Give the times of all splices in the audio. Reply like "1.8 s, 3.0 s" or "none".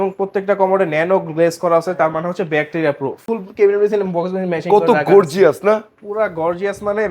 3.2 s